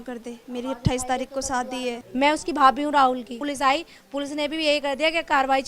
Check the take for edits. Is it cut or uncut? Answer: cut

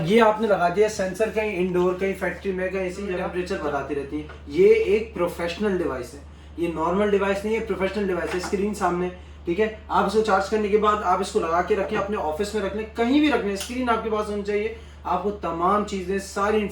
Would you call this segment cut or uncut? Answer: cut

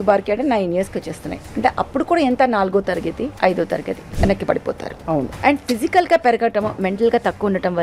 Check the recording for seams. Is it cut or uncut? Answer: cut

